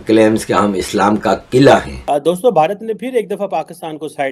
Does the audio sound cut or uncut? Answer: cut